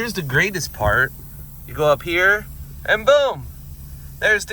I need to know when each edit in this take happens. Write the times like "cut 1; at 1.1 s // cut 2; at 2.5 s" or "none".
none